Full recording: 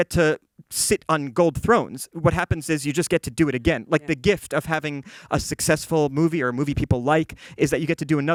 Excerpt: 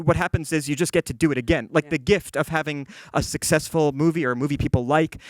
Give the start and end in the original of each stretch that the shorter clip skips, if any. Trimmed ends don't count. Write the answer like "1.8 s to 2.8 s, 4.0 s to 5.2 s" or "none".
none